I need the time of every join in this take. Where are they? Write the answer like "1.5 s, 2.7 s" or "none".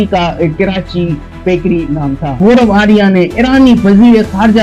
2.4 s